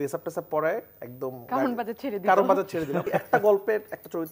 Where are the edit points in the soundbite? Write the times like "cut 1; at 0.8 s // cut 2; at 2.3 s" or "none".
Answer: cut 1; at 3.1 s